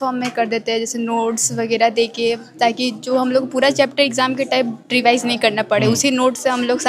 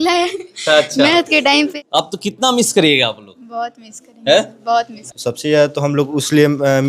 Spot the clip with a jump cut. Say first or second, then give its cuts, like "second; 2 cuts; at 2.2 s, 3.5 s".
second; 2 cuts; at 1.7 s, 5.0 s